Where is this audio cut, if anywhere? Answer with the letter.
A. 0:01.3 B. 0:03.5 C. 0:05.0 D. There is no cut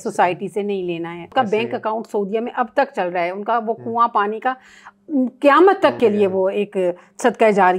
A